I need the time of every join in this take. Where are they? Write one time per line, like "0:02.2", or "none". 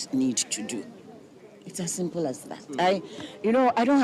none

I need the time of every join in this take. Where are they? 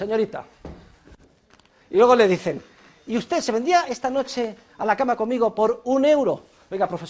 none

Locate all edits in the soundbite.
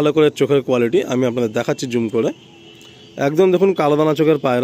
none

